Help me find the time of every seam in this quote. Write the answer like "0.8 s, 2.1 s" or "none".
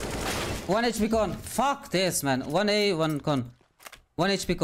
none